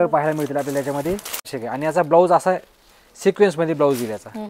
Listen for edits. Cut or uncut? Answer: cut